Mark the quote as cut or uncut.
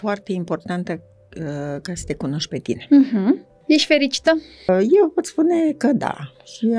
cut